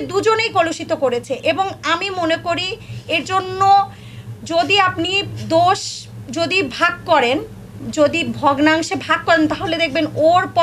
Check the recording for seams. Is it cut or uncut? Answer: uncut